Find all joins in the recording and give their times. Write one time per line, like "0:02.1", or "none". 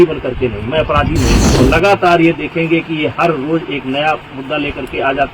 0:01.5